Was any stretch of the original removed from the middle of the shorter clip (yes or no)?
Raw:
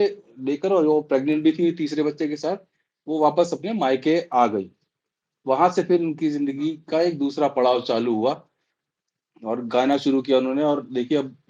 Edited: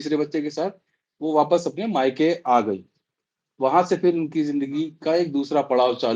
no